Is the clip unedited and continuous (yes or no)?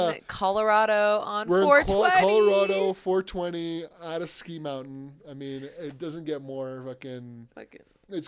yes